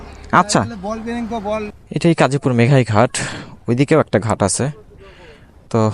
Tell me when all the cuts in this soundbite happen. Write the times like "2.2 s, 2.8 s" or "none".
1.8 s